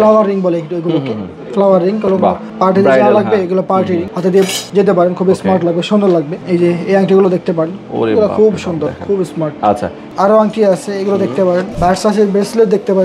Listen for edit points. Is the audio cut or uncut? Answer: cut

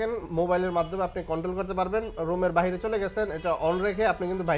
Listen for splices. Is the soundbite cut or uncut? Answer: uncut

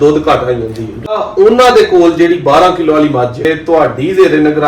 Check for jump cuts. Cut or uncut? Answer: cut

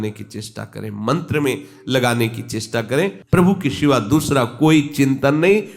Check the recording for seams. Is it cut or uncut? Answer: cut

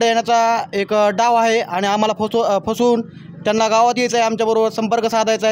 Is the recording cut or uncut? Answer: uncut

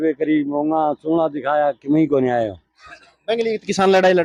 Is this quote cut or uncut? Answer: uncut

